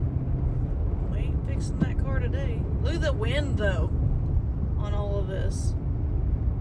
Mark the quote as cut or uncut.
uncut